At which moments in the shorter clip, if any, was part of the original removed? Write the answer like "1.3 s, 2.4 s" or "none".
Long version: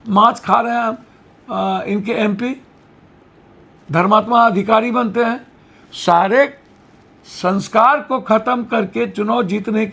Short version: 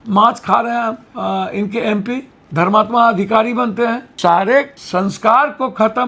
1.1 s, 2.4 s, 4.1 s, 4.8 s